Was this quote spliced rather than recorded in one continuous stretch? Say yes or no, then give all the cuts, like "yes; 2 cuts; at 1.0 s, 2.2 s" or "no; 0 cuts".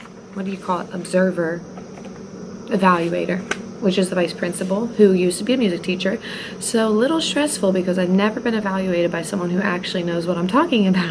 no; 0 cuts